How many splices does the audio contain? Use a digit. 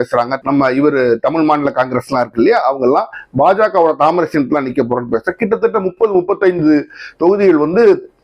0